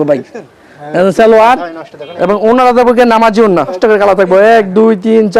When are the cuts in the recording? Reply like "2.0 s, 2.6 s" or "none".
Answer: 3.8 s